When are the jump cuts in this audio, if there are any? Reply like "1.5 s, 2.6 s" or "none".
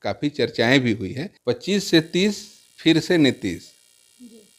1.3 s